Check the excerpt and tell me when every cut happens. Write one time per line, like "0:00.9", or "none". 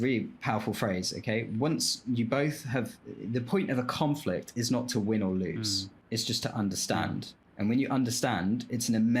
0:05.9
0:07.4